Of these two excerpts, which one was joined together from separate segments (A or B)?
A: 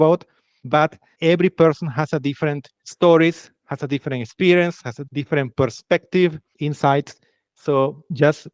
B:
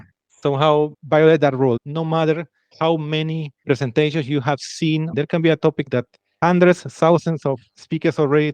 B